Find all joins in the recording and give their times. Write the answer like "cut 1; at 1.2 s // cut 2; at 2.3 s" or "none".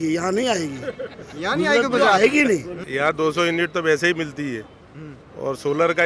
cut 1; at 2.8 s